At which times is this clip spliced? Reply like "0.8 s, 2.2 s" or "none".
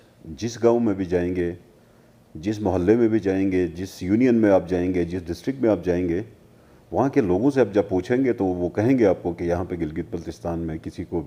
none